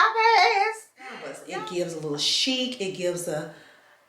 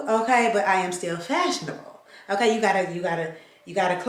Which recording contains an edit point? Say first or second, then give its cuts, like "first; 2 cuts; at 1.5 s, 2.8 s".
first; 1 cut; at 1.4 s